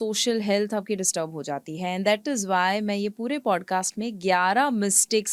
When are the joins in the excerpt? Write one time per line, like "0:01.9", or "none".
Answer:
none